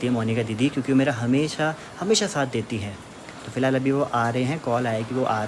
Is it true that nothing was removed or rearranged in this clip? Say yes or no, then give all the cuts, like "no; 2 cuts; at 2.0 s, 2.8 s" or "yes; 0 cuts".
yes; 0 cuts